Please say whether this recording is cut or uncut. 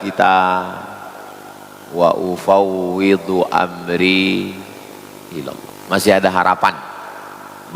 cut